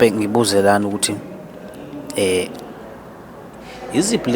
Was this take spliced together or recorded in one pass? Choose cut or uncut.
uncut